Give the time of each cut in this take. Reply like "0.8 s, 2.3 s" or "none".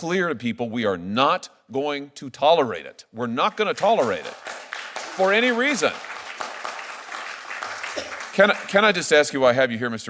none